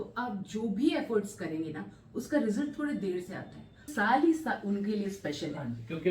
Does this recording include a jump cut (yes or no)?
yes